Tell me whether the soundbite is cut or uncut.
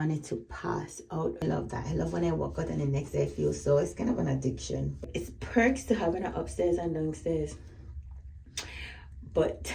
cut